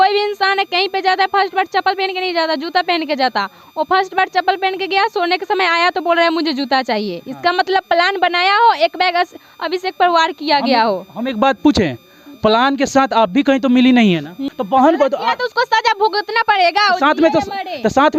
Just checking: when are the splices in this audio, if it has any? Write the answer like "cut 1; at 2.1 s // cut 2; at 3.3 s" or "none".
cut 1; at 14.4 s